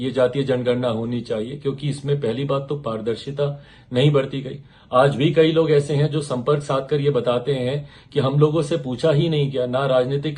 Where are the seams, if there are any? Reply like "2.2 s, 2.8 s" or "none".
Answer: none